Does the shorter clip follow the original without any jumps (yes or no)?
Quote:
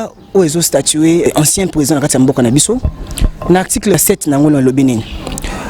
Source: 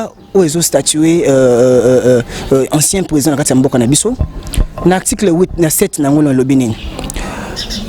no